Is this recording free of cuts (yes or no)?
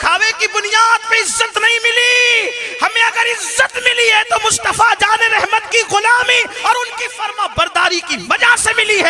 yes